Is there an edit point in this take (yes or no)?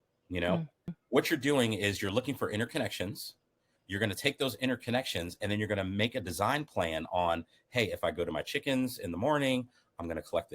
yes